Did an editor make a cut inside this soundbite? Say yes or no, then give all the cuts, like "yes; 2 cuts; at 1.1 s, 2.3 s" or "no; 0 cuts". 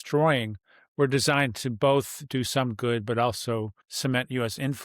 yes; 1 cut; at 3.8 s